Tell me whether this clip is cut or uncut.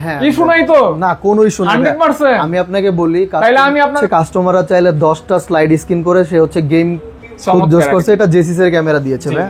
cut